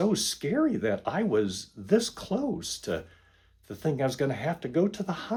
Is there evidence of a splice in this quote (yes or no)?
no